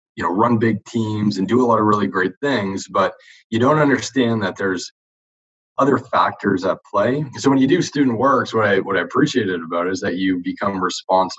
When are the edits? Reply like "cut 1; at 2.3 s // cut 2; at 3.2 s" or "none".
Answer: cut 1; at 7.3 s